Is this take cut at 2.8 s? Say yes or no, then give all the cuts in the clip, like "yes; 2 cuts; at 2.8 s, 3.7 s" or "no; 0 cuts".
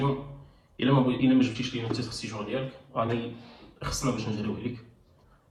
no; 0 cuts